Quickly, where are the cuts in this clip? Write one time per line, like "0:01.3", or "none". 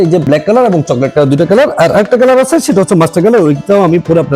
none

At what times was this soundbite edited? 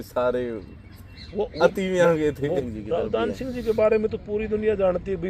0:02.7

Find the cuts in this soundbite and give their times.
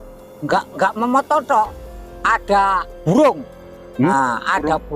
0:02.9

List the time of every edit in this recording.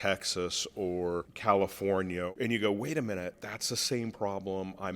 0:01.3
0:02.3
0:03.3

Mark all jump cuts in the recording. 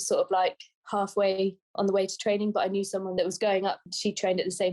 0:03.1

